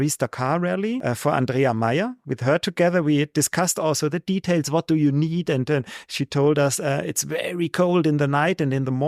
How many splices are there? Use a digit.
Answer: 1